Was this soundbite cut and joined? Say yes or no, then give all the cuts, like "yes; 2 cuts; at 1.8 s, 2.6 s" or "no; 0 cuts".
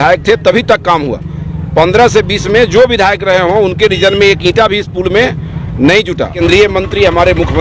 yes; 1 cut; at 6.3 s